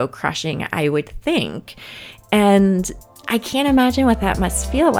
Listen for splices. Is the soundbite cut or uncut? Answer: uncut